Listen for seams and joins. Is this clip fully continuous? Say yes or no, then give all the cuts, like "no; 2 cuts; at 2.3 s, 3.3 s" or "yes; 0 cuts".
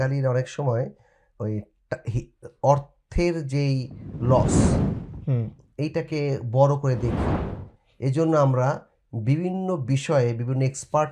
yes; 0 cuts